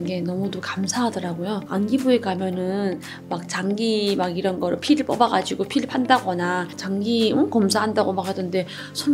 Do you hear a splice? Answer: yes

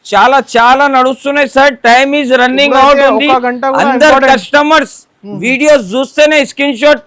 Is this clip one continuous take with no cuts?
yes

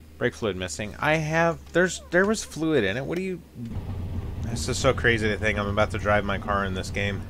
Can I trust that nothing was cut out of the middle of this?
no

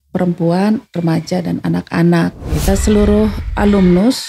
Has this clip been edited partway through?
yes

